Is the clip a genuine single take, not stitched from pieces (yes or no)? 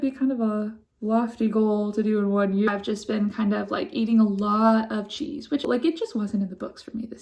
no